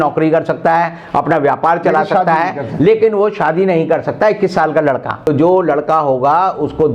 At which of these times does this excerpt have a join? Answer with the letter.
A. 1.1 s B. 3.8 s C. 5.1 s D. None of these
C